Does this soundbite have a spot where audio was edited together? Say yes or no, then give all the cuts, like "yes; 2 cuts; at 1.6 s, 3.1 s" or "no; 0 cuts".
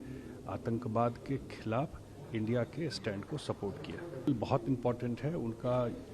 yes; 1 cut; at 4.3 s